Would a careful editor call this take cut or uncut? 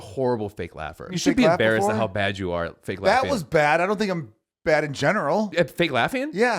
cut